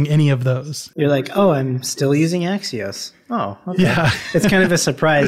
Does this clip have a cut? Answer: no; 0 cuts

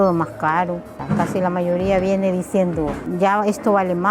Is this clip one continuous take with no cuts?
no; 2 cuts; at 0.9 s, 3.0 s

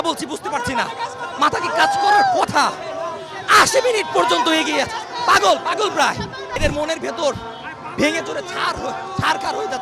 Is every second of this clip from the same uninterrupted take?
no; 1 cut; at 6.4 s

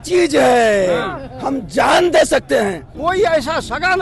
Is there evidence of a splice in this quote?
yes; 1 cut; at 2.9 s

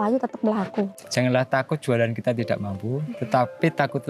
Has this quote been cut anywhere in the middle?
yes; 1 cut; at 1.0 s

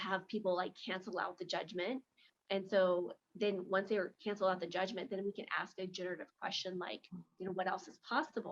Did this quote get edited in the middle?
no; 0 cuts

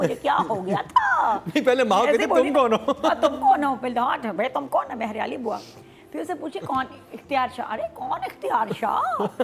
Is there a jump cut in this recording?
no; 0 cuts

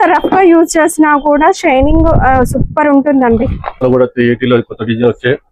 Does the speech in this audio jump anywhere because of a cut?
yes; 1 cut; at 3.8 s

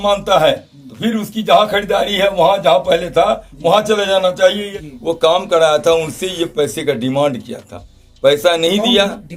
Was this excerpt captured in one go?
no; 1 cut; at 4.7 s

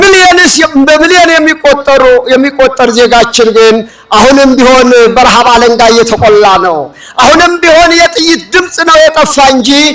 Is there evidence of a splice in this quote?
no; 0 cuts

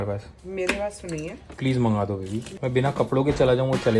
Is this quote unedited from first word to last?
no; 2 cuts; at 1.5 s, 2.5 s

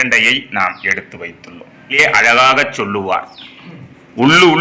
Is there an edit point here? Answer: yes; 1 cut; at 1.9 s

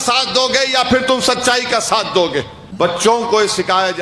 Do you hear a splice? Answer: yes; 1 cut; at 2.6 s

